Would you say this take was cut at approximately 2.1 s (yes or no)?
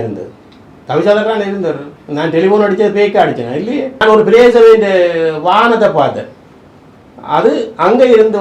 no